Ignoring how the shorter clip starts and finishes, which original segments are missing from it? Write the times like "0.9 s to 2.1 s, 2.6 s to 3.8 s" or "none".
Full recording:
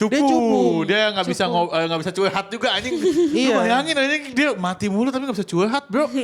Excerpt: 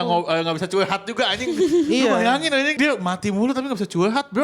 4.2 s to 4.3 s